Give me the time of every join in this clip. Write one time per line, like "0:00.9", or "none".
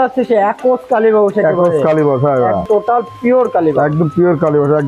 0:02.6